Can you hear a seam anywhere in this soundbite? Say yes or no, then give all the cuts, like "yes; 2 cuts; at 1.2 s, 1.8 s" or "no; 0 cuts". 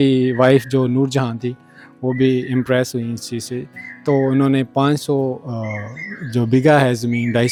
no; 0 cuts